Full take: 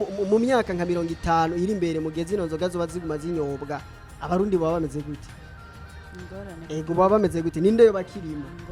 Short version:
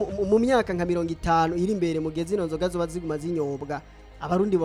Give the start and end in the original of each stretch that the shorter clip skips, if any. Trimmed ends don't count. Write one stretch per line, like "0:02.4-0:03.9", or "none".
none